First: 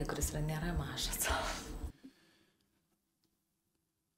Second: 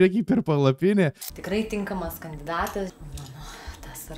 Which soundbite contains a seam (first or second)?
second